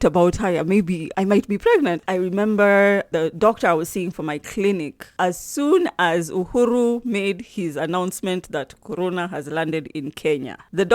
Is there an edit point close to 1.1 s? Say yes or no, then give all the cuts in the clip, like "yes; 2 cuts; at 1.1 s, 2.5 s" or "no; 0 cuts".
yes; 2 cuts; at 1.1 s, 2.0 s